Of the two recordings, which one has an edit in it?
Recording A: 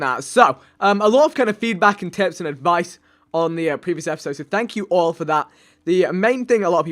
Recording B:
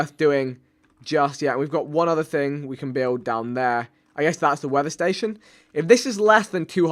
A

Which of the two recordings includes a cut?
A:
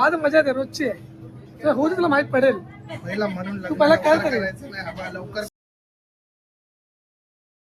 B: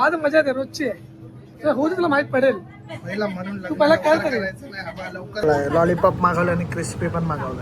B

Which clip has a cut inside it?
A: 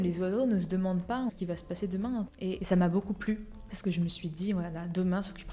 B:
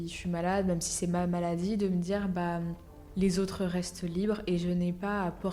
A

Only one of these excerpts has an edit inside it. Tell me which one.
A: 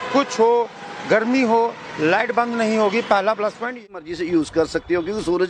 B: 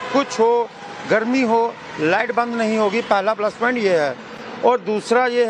A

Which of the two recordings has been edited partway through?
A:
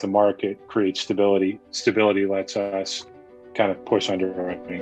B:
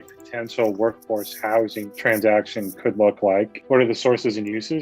B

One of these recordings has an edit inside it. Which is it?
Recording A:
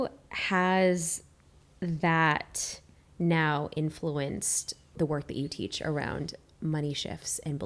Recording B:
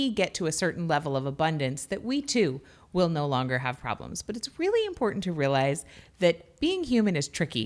A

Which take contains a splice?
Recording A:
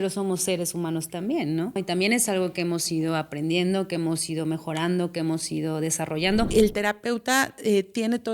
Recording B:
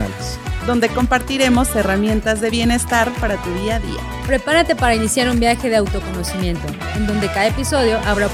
A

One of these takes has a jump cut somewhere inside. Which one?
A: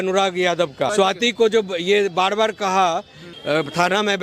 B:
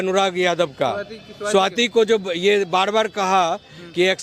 A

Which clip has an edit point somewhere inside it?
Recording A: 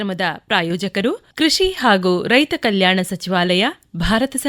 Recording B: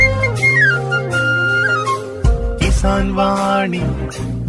A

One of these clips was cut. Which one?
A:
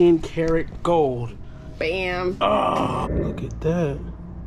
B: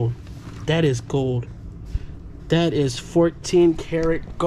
A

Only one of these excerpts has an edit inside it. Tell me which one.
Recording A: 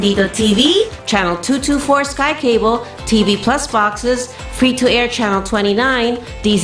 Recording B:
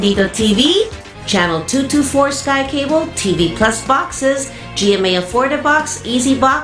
B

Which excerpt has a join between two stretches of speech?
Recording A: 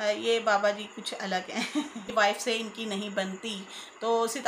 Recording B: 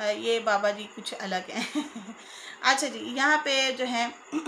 A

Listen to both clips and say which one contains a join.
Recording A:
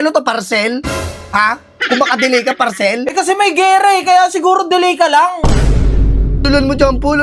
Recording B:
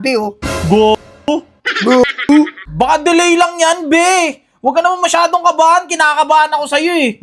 B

